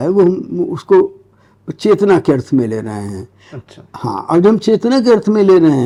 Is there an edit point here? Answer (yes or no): no